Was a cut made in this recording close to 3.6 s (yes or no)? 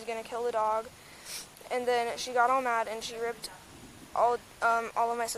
no